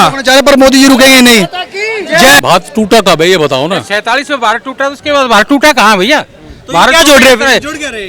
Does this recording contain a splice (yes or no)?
yes